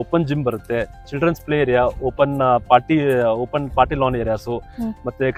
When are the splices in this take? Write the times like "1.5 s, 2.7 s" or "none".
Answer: none